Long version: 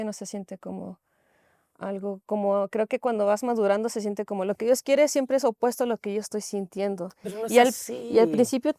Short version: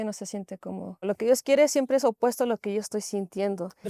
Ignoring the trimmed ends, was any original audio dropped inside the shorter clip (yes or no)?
yes